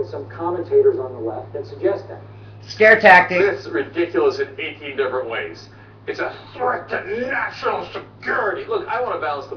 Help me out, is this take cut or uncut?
cut